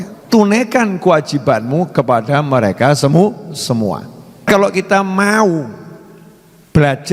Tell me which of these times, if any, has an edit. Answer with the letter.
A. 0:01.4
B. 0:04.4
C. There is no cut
B